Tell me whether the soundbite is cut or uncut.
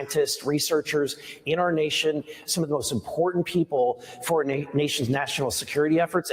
uncut